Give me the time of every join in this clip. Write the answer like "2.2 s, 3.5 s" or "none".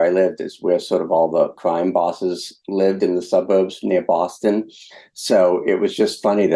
1.6 s, 2.5 s